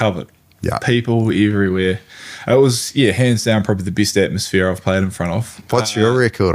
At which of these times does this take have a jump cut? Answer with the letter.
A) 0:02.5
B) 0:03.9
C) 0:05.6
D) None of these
C